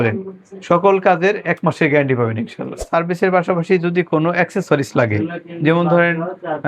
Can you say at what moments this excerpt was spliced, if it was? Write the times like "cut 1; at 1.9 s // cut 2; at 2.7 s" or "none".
cut 1; at 2.8 s